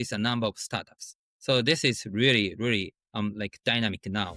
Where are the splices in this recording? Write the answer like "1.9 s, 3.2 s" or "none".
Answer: none